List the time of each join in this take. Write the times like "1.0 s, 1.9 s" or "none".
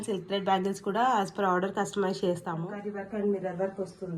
2.7 s